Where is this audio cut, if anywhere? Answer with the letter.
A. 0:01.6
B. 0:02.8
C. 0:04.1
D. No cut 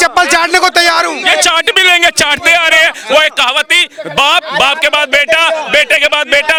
D